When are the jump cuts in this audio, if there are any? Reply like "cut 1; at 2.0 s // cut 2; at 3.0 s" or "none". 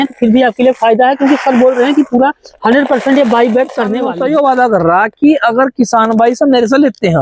cut 1; at 3.9 s